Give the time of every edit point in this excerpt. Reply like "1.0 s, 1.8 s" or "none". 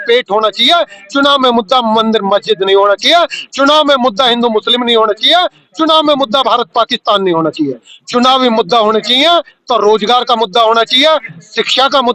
none